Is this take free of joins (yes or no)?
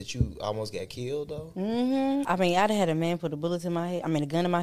no